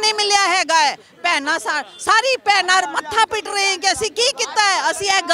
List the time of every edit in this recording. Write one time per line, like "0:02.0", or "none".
none